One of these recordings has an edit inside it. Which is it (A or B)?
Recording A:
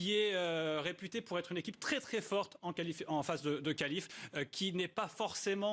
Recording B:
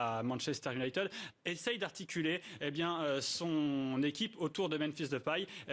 A